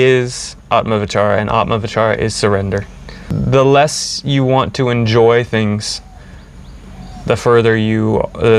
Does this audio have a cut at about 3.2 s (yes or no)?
yes